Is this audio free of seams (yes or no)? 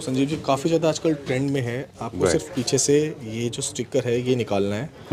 yes